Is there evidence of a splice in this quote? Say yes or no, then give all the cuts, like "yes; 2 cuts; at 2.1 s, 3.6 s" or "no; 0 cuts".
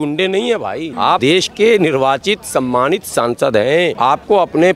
yes; 2 cuts; at 1.1 s, 3.9 s